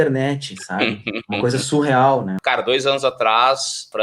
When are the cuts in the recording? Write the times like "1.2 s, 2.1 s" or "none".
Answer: 2.3 s